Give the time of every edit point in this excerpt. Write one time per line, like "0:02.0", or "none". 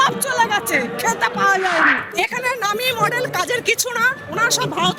0:02.1